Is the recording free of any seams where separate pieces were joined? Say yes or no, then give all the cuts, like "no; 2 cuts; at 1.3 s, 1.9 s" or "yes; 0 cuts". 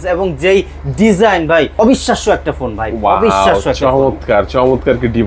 no; 1 cut; at 1.7 s